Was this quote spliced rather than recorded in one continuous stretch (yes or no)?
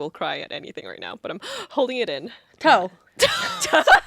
yes